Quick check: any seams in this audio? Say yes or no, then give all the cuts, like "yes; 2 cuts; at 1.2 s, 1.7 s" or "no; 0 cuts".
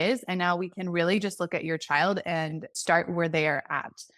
yes; 1 cut; at 2.7 s